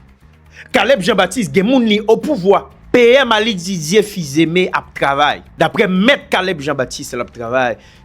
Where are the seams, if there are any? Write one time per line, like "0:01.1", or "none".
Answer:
0:02.7
0:05.5